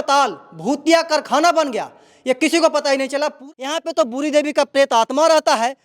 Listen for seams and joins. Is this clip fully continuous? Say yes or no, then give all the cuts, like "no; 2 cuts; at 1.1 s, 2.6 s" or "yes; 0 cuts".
no; 1 cut; at 3.3 s